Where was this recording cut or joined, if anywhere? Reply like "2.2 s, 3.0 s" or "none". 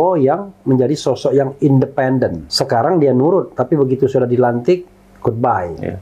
2.5 s

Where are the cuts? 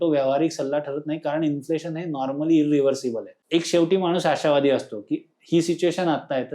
3.3 s

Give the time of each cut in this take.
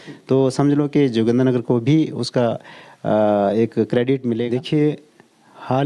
4.5 s

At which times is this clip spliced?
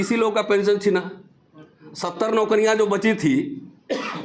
none

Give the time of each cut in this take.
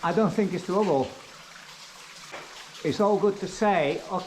2.3 s

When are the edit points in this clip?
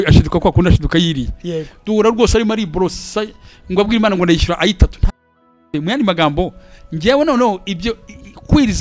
5.7 s

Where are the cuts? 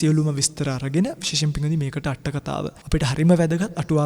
2.8 s

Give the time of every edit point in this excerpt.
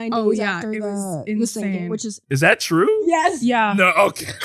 none

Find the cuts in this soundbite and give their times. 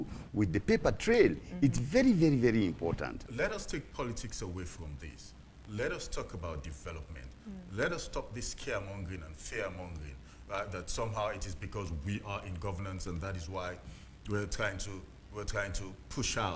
3.1 s

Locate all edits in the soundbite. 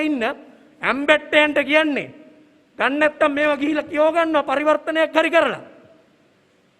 none

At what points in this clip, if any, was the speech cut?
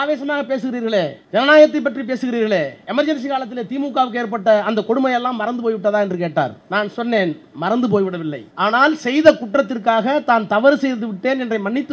1.2 s, 2.8 s, 6.6 s, 8.4 s

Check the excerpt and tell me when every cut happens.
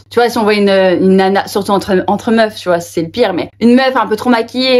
none

